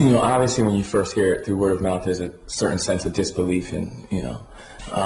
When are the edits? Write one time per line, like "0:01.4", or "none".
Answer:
none